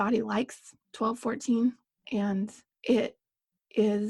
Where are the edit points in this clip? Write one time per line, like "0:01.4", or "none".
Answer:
0:02.7